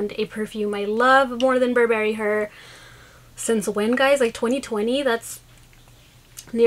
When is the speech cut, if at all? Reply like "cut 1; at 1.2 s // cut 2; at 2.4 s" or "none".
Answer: none